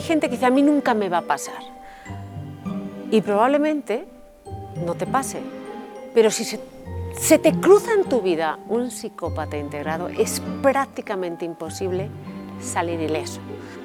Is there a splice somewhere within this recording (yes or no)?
no